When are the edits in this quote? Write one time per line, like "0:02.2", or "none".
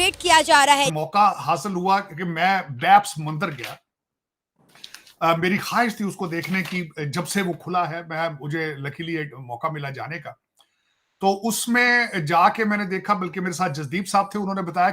0:01.0